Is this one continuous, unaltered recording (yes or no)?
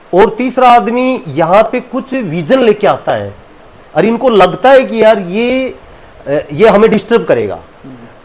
yes